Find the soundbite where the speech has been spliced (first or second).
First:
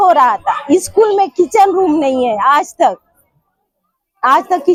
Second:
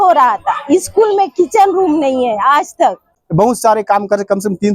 second